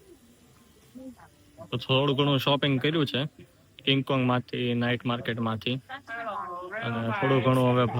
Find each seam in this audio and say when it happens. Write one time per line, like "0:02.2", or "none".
none

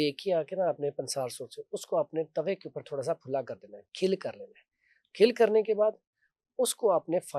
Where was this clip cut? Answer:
none

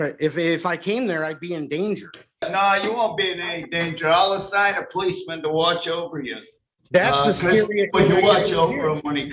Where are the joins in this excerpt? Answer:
0:02.4

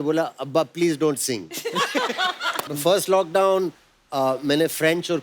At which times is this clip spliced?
0:02.7

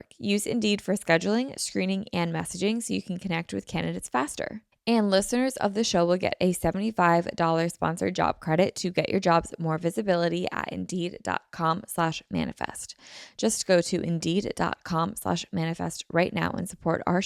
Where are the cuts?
0:04.7

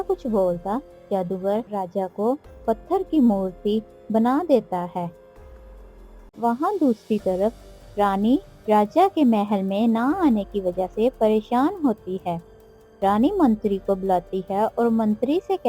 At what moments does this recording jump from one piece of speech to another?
none

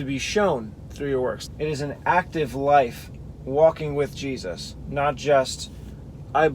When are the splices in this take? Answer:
0:01.4

